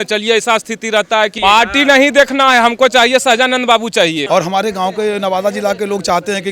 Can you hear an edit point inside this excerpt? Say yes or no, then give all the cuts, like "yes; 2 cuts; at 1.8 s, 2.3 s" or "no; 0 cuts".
yes; 2 cuts; at 1.4 s, 4.3 s